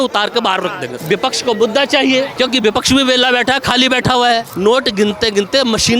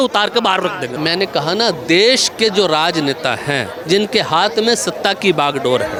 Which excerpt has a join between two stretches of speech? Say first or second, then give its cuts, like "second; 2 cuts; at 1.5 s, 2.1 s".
first; 3 cuts; at 1.0 s, 2.3 s, 4.5 s